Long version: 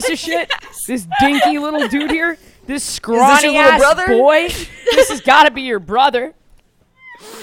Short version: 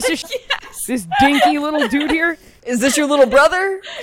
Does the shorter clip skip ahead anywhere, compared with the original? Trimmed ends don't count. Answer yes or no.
yes